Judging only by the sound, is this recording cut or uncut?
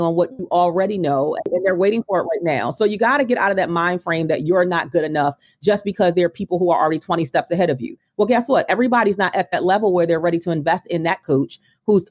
cut